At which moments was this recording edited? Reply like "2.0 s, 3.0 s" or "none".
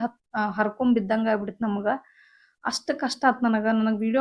none